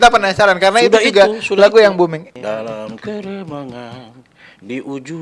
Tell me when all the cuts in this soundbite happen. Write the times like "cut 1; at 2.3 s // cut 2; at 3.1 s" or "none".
cut 1; at 2.3 s